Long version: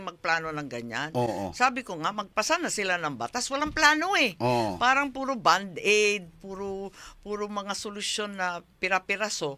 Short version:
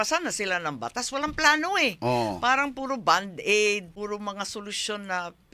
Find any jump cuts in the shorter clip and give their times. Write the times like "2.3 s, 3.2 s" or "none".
3.9 s